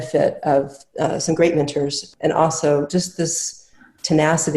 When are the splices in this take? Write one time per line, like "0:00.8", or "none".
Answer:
0:02.0